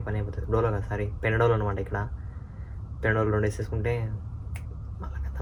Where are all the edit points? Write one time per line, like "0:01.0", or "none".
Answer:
none